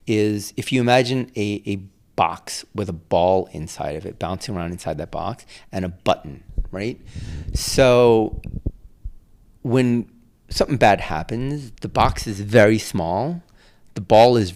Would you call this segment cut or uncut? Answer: uncut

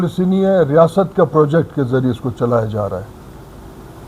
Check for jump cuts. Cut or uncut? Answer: uncut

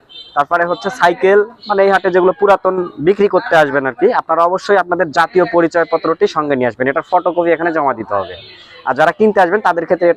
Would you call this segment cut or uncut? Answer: uncut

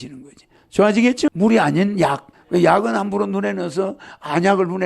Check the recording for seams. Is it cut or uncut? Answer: cut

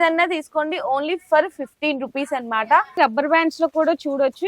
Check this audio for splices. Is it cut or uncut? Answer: cut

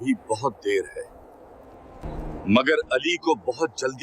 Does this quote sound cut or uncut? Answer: cut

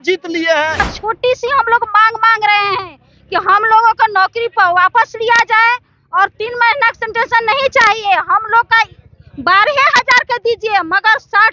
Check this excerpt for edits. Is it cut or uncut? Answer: cut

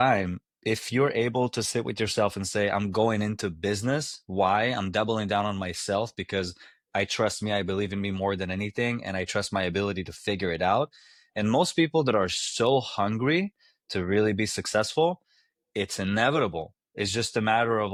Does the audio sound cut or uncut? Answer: uncut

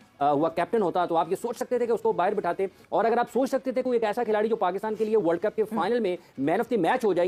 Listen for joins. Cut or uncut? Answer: uncut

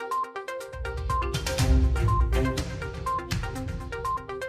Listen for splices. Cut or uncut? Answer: cut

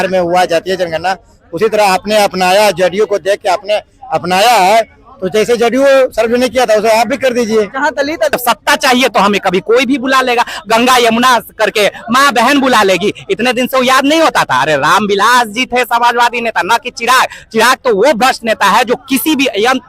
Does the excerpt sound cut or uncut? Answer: cut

